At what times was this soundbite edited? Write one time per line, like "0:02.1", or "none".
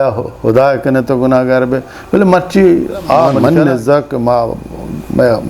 0:03.3